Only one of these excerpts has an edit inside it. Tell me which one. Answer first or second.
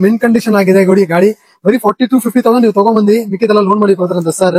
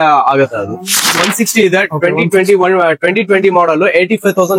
second